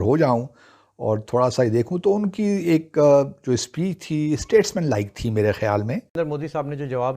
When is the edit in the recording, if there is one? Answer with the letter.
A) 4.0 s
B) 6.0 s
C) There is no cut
B